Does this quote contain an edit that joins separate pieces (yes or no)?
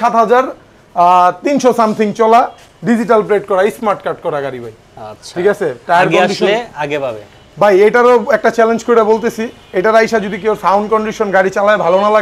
no